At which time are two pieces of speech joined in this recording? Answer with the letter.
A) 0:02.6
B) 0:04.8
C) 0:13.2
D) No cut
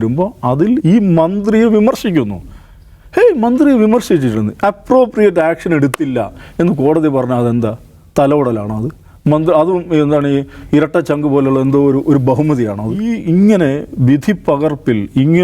C